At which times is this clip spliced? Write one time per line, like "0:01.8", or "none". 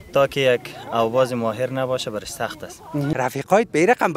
0:03.1